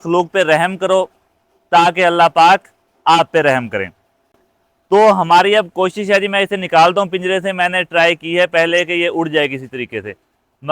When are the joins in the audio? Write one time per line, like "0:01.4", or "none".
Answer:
none